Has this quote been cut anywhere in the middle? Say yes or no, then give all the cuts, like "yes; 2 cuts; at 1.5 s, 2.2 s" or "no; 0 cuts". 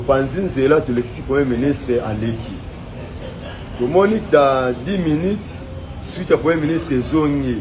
no; 0 cuts